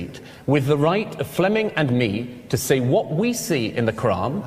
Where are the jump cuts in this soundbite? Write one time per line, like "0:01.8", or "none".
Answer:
none